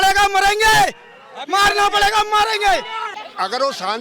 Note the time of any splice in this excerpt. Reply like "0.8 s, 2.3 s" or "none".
3.0 s